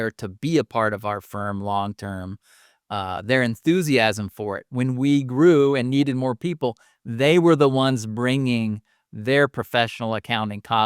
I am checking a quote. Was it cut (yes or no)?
no